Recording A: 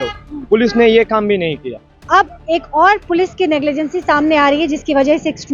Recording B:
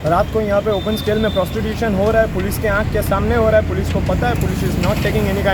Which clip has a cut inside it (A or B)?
A